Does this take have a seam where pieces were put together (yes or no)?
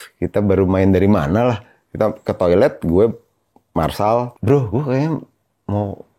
yes